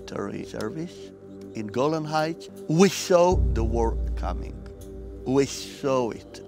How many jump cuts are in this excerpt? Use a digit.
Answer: 1